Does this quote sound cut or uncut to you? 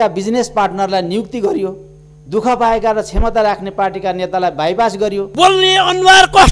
cut